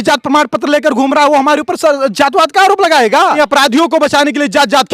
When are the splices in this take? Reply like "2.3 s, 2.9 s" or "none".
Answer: 3.4 s